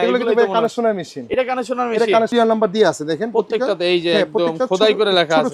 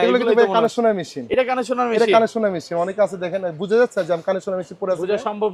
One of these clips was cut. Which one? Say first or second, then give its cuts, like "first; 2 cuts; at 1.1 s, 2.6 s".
first; 1 cut; at 2.3 s